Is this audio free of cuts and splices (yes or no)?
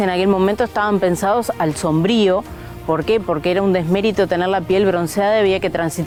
yes